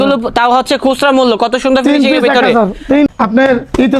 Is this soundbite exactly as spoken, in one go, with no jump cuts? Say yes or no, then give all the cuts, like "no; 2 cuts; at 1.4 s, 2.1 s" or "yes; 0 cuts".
no; 1 cut; at 3.1 s